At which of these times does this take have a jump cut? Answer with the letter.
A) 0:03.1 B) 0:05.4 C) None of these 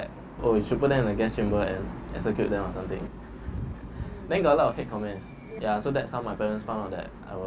C